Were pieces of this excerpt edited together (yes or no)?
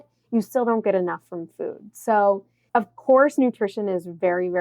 yes